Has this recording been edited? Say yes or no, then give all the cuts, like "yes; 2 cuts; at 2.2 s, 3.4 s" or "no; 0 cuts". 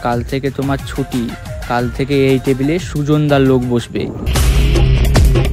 yes; 1 cut; at 4.2 s